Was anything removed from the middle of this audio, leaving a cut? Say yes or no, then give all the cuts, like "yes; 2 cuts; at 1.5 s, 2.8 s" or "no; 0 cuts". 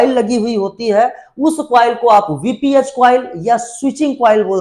no; 0 cuts